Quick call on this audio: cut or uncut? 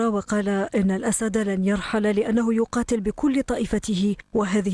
cut